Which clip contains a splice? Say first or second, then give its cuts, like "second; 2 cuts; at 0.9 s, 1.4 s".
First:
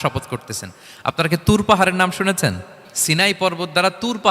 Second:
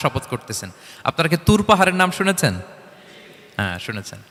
first; 1 cut; at 2.9 s